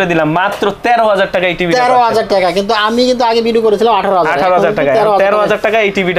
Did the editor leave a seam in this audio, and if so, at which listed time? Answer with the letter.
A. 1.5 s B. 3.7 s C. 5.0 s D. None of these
D